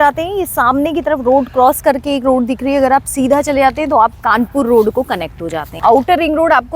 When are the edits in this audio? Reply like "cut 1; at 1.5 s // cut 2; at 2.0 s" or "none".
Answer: cut 1; at 5.7 s